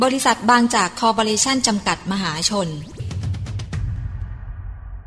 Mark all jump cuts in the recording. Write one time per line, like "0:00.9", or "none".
0:03.0